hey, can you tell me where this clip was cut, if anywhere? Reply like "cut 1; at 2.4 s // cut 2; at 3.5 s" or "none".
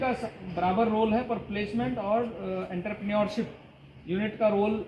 none